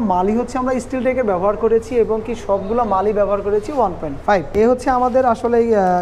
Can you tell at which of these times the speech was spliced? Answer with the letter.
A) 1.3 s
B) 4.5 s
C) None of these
B